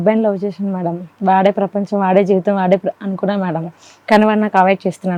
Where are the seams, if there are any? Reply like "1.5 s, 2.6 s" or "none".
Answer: none